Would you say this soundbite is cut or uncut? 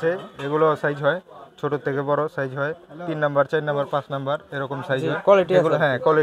uncut